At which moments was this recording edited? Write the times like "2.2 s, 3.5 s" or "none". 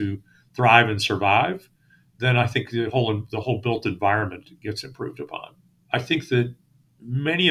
5.8 s